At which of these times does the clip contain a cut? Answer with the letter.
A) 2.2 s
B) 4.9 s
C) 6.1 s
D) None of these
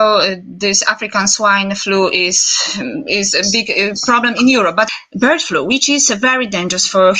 B